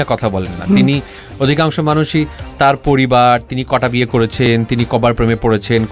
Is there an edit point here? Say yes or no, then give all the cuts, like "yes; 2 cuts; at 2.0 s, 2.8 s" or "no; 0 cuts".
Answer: no; 0 cuts